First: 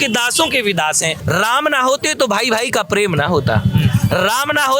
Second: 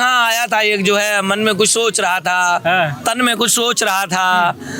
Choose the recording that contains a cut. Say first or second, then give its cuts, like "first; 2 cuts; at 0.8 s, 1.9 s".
first; 1 cut; at 1.2 s